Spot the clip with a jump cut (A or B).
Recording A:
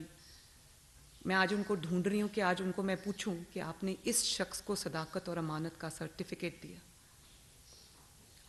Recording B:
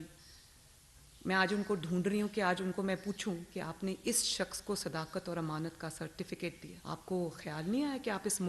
B